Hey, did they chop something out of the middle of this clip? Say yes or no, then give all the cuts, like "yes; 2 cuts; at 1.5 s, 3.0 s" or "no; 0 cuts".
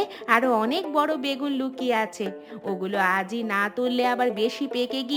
no; 0 cuts